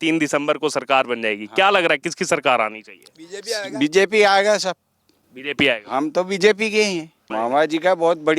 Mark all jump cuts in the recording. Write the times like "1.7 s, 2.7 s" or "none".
7.3 s